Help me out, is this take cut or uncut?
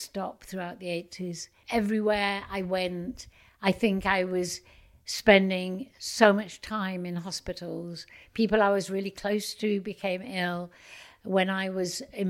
cut